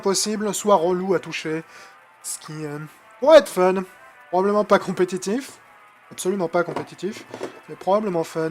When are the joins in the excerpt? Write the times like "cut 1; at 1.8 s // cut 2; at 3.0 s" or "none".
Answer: cut 1; at 5.2 s